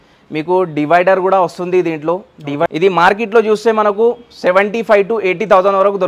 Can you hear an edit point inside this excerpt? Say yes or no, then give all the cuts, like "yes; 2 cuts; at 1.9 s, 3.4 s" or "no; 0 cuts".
yes; 1 cut; at 2.7 s